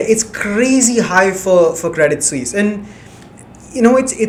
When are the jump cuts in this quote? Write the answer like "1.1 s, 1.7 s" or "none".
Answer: none